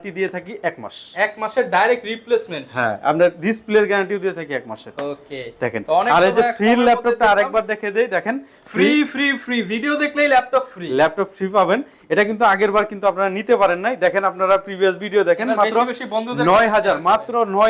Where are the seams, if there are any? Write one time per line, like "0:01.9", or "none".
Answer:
none